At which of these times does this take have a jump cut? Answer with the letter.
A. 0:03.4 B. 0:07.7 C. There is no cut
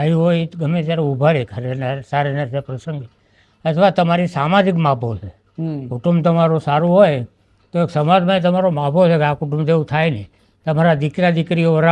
C